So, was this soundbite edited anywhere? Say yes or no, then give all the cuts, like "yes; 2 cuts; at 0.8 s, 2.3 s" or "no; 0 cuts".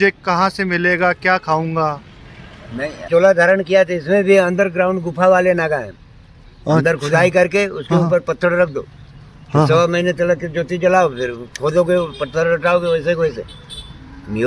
yes; 1 cut; at 3.1 s